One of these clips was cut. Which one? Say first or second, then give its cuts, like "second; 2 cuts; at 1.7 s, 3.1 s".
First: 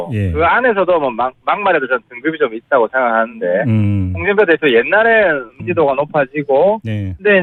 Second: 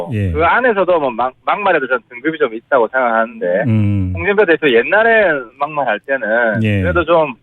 second; 1 cut; at 5.7 s